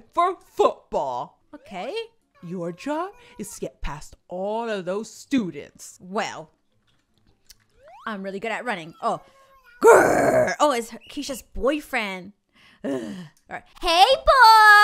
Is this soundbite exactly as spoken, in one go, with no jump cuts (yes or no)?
yes